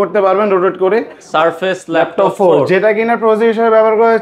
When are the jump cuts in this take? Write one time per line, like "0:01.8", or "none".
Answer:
0:01.2